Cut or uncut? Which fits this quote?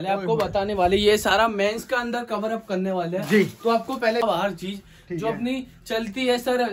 cut